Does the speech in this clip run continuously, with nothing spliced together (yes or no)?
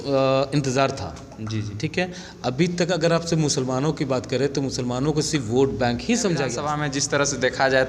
no